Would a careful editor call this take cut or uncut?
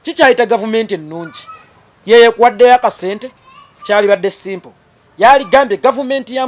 uncut